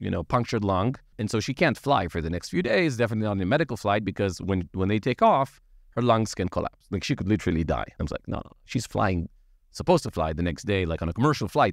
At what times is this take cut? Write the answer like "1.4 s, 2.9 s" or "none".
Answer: 1.1 s, 7.9 s